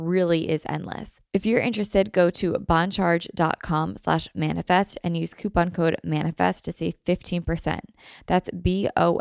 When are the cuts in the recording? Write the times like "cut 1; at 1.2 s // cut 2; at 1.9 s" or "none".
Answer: cut 1; at 1.1 s